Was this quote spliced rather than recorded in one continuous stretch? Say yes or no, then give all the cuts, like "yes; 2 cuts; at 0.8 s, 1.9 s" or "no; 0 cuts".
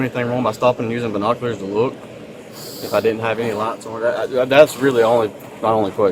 no; 0 cuts